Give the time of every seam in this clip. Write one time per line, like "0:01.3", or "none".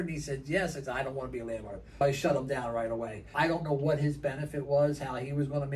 0:02.0
0:03.3